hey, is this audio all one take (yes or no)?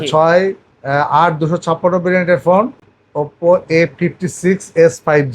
no